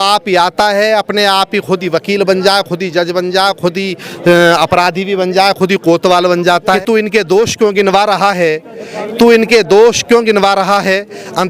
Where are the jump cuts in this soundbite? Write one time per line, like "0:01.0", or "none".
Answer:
0:06.8